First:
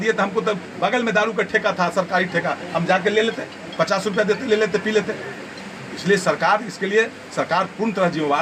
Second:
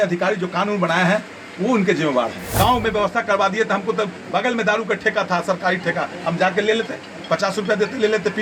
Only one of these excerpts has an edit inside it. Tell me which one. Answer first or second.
second